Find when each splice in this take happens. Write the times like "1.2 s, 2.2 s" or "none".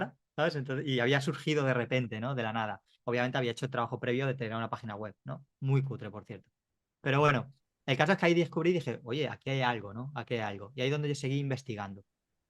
none